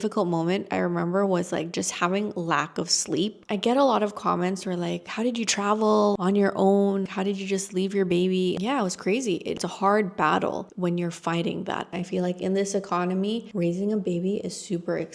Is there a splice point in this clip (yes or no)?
yes